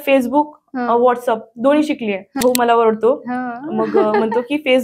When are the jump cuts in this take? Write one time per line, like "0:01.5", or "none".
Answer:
0:02.3